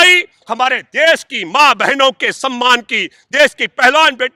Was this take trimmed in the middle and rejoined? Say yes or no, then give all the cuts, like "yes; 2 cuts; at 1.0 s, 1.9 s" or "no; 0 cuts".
no; 0 cuts